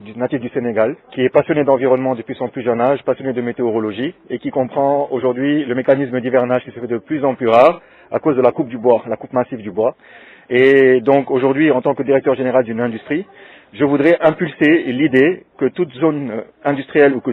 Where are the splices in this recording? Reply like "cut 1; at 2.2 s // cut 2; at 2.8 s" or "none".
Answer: cut 1; at 1.0 s